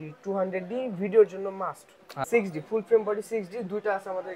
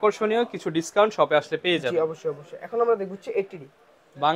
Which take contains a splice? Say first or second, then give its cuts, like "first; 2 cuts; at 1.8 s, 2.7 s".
first; 1 cut; at 2.1 s